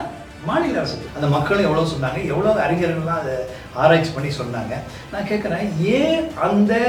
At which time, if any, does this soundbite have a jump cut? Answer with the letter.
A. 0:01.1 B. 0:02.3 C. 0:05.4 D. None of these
A